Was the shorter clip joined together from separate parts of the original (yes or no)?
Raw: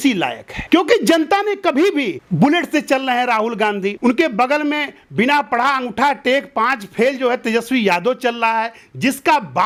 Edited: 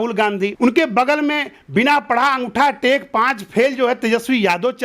no